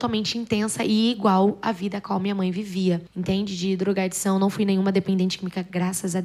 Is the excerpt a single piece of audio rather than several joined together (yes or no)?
yes